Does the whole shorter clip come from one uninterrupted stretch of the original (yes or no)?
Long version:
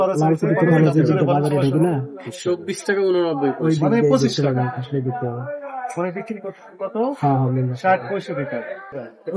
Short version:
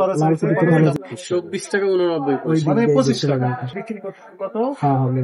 no